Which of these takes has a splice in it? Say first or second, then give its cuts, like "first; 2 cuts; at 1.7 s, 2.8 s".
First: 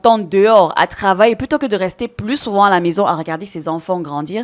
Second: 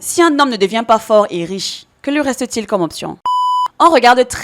second; 1 cut; at 3.3 s